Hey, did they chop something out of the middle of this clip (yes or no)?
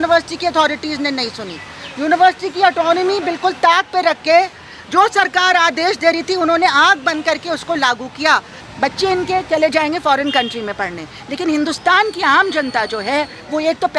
yes